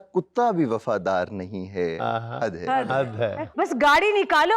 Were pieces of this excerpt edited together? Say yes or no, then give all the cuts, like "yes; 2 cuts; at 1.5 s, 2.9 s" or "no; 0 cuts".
yes; 1 cut; at 3.4 s